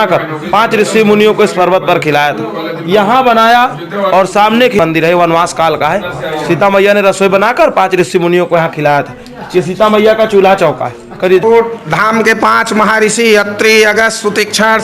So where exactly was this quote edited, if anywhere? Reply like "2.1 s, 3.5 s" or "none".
4.8 s, 11.4 s